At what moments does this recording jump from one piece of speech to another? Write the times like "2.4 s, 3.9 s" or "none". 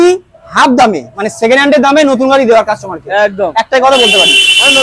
none